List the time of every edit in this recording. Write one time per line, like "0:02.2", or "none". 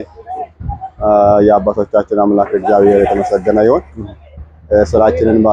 none